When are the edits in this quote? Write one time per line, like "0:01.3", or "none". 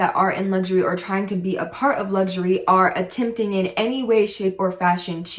none